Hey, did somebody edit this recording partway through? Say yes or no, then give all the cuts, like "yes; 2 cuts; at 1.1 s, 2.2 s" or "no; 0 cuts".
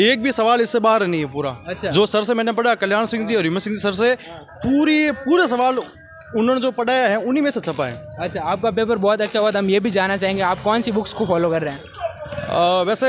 no; 0 cuts